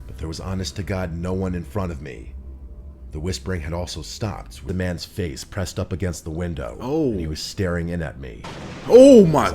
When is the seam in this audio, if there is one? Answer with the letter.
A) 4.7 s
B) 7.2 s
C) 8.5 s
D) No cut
A